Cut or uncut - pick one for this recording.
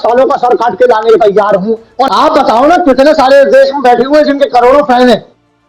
cut